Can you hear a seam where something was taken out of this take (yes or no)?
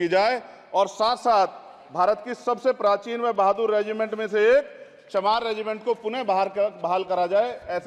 no